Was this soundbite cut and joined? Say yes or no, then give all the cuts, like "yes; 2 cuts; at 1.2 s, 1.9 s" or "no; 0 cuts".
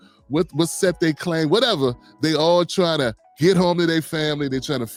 no; 0 cuts